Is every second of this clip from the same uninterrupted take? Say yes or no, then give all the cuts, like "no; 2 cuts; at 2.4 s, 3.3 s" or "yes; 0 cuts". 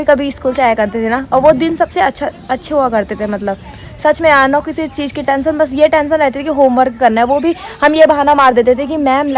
yes; 0 cuts